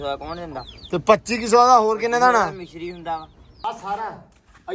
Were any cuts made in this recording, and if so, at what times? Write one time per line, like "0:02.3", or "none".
0:03.5